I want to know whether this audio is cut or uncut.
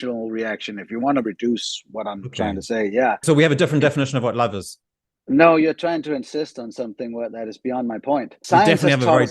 cut